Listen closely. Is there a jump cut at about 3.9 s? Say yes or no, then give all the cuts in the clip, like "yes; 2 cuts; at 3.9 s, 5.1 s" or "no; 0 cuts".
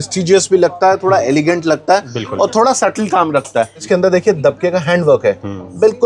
yes; 1 cut; at 3.9 s